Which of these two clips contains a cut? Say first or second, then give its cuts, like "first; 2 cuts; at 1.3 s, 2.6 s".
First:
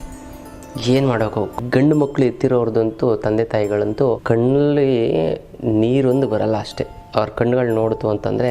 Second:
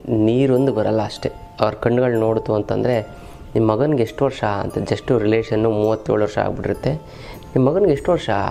first; 2 cuts; at 1.6 s, 4.2 s